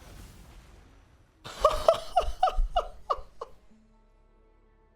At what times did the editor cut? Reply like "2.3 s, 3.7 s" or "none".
none